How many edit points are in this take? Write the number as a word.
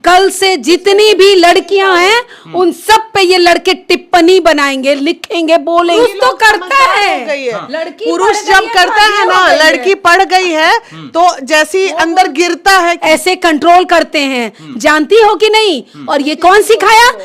two